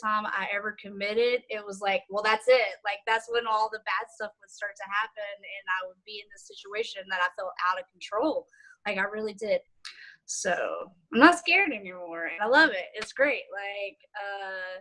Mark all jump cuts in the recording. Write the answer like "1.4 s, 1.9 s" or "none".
9.8 s